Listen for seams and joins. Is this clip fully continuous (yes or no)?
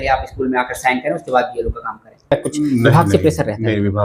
no